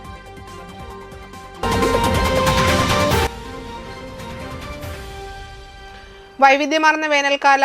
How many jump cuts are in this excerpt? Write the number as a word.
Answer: one